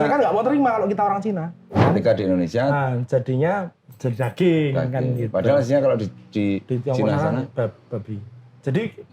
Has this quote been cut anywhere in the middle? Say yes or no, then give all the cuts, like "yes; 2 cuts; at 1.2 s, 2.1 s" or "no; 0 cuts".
yes; 1 cut; at 1.8 s